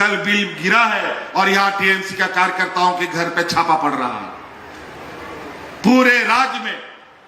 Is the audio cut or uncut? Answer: uncut